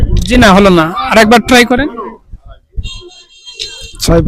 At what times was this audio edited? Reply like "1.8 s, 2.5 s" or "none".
none